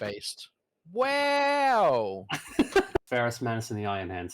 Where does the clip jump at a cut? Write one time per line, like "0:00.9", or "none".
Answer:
0:03.1